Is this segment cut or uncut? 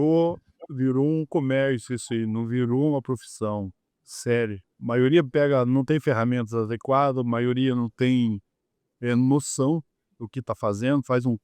cut